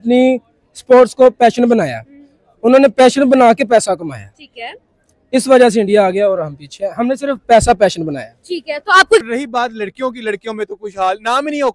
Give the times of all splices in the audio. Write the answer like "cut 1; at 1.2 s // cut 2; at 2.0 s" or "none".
cut 1; at 9.2 s